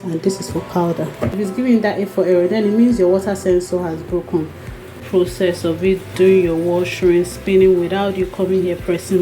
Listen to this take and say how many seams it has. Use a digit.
2